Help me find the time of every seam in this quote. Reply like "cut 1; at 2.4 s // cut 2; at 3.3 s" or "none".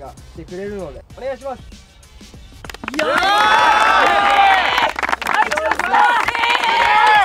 cut 1; at 1.0 s